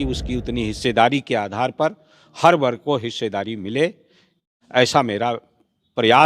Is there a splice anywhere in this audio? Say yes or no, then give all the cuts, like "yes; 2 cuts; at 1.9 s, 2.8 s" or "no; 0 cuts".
yes; 1 cut; at 4.4 s